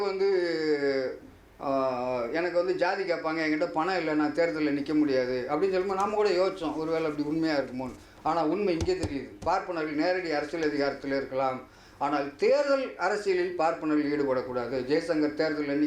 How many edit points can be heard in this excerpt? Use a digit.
0